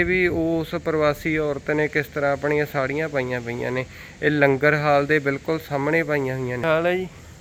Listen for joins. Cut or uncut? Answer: uncut